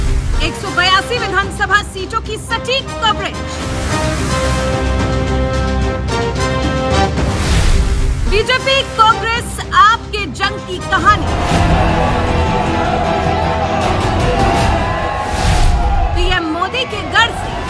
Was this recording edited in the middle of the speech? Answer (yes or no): no